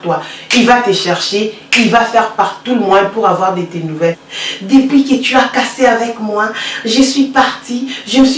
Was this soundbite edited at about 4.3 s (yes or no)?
yes